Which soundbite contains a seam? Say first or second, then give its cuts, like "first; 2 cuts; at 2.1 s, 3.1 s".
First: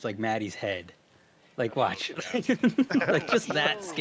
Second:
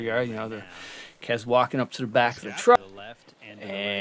second; 1 cut; at 2.8 s